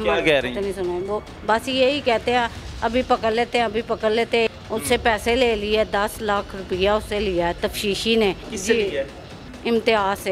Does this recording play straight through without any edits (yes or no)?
no